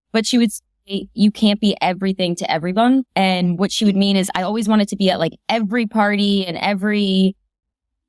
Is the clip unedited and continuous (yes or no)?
no